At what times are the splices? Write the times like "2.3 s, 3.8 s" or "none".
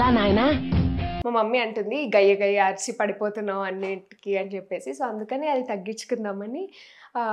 1.1 s